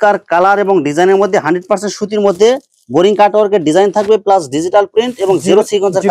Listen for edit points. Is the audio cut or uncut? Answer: uncut